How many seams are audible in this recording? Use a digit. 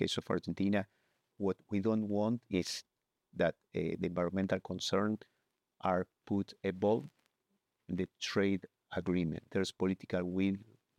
2